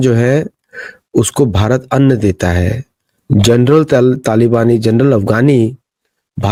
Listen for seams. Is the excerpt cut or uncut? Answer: uncut